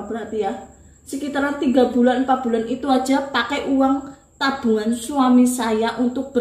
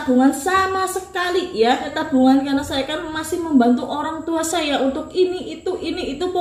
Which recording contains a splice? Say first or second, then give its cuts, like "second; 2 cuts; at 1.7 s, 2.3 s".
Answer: second; 1 cut; at 2.0 s